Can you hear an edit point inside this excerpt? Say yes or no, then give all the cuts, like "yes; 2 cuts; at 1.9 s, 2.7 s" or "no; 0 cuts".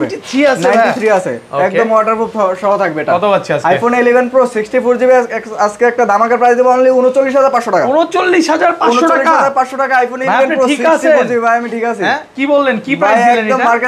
no; 0 cuts